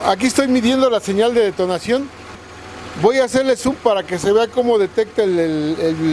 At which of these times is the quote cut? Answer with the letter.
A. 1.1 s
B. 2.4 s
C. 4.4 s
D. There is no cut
B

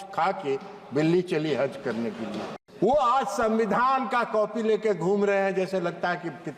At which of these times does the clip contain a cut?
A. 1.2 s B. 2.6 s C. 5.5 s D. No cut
B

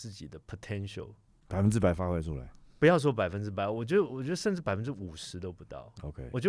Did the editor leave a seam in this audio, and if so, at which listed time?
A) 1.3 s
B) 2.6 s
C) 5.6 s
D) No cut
A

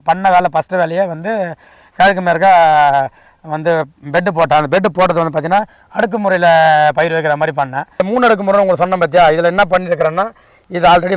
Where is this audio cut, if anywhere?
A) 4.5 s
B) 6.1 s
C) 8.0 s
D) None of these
C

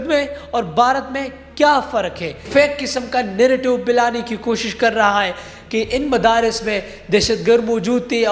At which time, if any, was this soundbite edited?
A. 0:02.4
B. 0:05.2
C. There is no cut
A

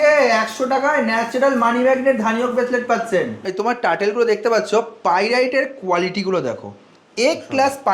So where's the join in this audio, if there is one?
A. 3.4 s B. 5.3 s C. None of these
A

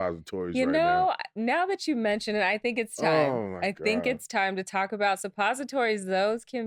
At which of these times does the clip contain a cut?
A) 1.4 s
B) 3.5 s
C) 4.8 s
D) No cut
D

